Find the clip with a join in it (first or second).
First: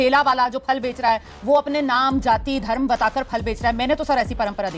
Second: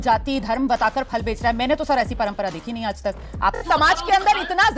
second